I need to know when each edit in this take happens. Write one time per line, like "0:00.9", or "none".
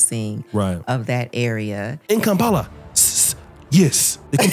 0:02.0